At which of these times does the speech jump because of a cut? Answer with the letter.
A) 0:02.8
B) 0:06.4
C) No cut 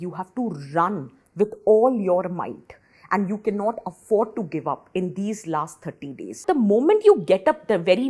B